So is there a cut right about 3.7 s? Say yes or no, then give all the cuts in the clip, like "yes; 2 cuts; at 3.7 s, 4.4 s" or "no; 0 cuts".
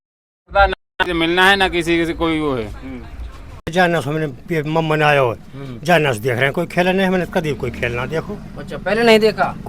yes; 1 cut; at 3.7 s